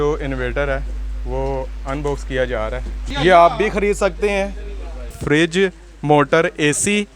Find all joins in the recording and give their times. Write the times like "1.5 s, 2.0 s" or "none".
3.1 s, 5.2 s

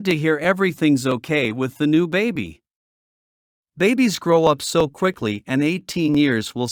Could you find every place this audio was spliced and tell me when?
none

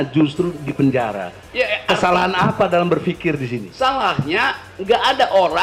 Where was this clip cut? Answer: none

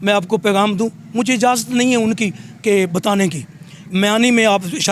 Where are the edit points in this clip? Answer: none

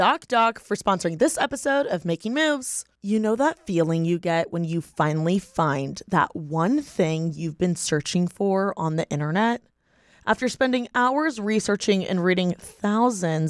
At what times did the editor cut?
none

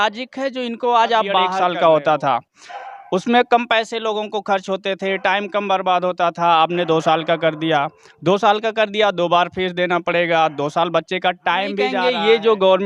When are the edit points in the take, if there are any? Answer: 1.6 s, 12.0 s

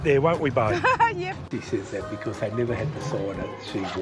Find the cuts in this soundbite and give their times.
1.4 s

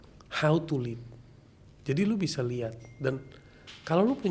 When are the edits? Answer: none

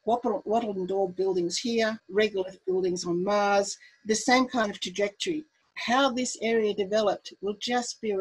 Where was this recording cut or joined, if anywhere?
2.0 s

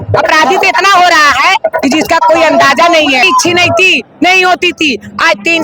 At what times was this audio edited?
3.2 s

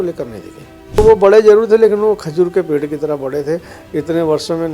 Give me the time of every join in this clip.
1.0 s

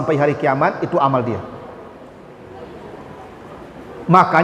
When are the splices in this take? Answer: none

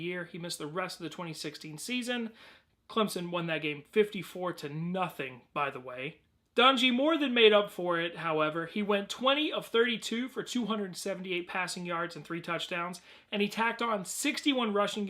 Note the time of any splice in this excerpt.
14.1 s

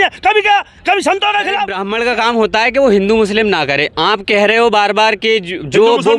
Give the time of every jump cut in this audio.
1.8 s

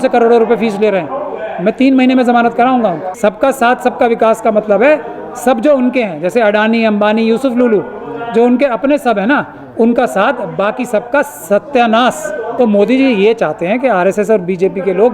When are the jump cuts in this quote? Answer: 3.1 s, 12.5 s

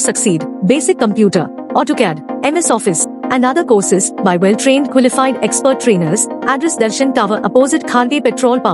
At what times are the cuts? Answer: none

